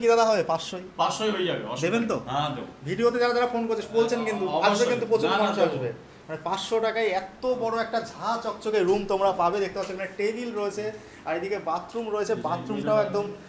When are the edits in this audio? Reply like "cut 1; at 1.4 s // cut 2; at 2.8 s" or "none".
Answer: none